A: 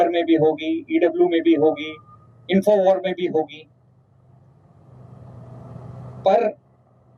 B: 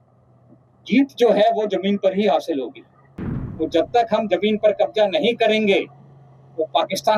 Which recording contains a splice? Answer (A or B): B